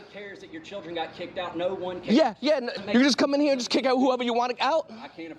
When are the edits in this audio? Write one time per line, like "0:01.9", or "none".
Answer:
0:02.8